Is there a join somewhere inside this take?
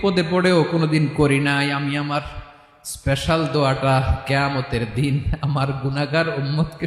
no; 0 cuts

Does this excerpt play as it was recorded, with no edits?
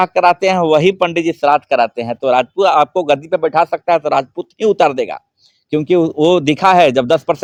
yes; 0 cuts

